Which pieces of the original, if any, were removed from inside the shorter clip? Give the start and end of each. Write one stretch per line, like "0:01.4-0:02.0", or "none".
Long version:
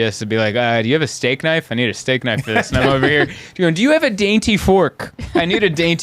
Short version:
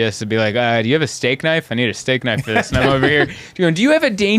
none